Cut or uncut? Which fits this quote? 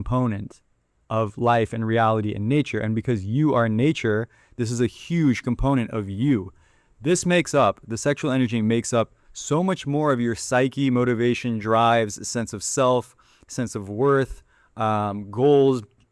uncut